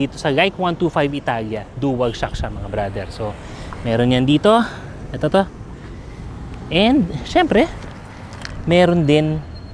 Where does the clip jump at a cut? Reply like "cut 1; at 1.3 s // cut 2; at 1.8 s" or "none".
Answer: none